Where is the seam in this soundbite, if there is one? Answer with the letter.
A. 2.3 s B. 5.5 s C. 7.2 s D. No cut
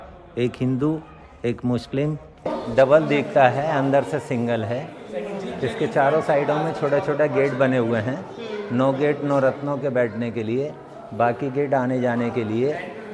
A